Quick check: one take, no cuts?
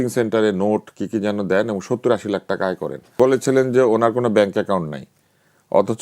no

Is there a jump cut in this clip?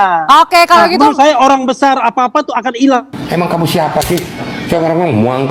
yes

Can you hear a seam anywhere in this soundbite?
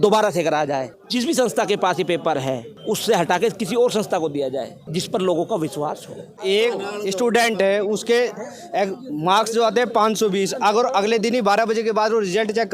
yes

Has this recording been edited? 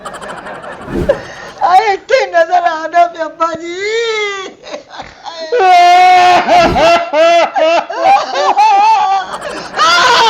yes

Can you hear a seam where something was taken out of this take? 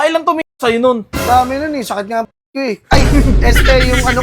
no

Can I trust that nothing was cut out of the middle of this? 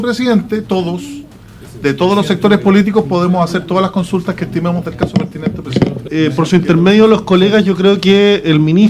no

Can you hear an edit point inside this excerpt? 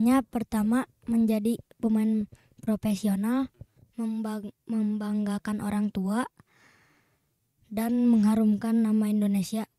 no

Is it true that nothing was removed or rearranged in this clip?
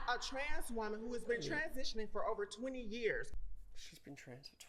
no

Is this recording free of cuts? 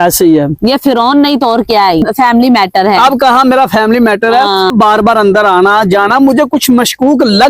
no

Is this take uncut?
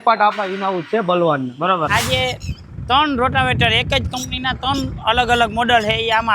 no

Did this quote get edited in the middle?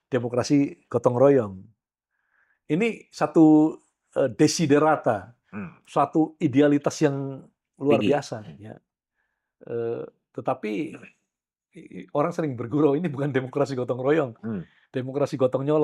no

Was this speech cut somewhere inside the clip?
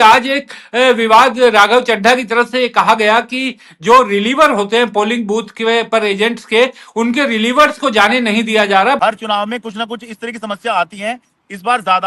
yes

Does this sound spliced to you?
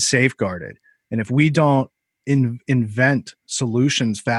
no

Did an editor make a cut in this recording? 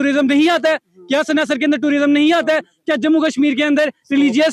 no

